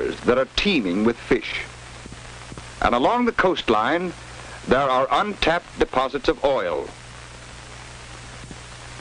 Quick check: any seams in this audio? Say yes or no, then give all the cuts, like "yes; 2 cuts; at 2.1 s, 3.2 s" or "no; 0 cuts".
no; 0 cuts